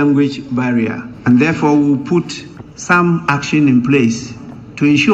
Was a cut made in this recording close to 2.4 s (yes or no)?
no